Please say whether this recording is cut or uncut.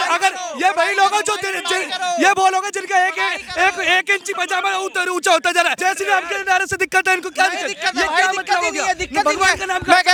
uncut